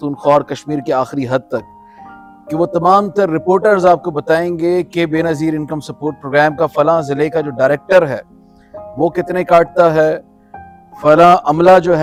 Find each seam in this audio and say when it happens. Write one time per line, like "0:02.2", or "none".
none